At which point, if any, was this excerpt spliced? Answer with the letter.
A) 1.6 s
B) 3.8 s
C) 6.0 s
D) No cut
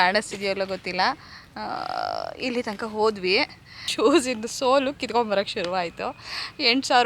B